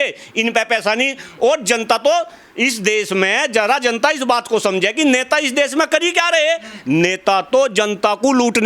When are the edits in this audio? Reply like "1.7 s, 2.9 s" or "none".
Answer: none